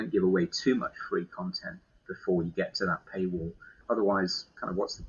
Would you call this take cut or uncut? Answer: cut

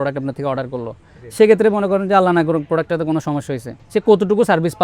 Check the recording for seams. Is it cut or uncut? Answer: cut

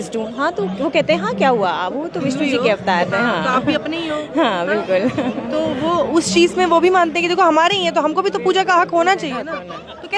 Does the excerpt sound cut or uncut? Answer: uncut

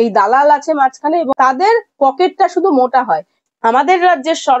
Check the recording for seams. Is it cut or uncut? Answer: cut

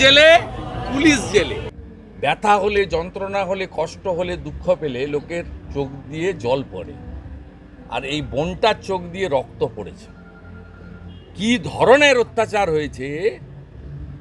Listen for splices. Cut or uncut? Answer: cut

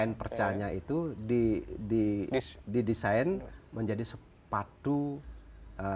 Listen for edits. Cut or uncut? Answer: uncut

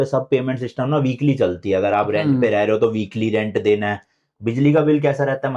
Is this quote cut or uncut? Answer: uncut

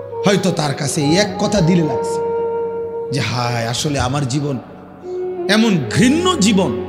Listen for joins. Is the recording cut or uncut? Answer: uncut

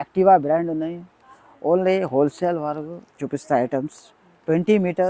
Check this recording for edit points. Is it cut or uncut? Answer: uncut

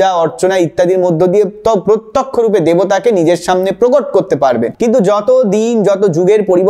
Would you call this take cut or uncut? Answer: cut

